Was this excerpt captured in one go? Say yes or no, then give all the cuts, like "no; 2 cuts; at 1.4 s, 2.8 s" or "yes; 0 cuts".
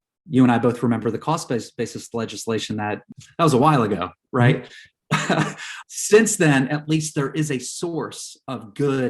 no; 2 cuts; at 3.1 s, 5.7 s